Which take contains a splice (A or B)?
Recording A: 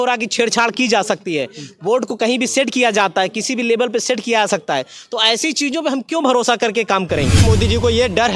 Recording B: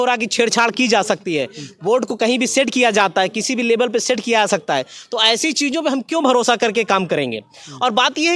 A